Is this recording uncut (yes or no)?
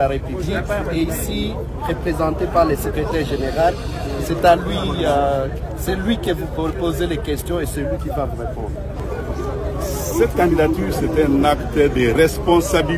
no